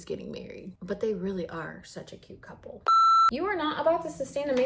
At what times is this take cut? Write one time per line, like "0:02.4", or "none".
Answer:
0:03.0